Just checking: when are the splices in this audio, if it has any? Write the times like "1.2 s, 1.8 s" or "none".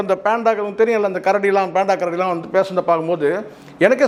none